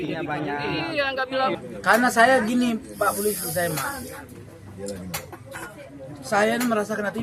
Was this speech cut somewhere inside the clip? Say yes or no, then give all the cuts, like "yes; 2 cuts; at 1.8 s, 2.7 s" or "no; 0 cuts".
yes; 1 cut; at 1.6 s